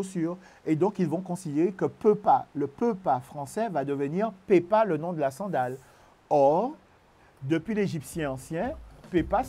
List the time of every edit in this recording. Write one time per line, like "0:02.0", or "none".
none